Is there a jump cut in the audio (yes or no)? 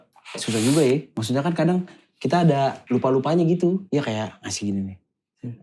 yes